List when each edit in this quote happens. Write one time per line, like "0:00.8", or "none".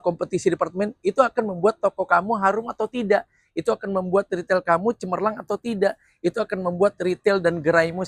none